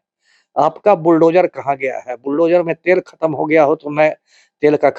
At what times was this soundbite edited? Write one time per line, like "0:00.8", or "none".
none